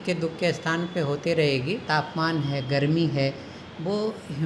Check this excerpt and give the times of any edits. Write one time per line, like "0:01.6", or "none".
0:01.8